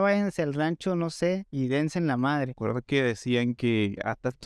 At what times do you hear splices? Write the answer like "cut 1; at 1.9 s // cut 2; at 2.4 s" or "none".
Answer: cut 1; at 2.6 s